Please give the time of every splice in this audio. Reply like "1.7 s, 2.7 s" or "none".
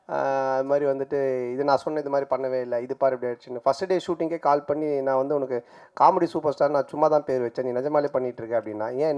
none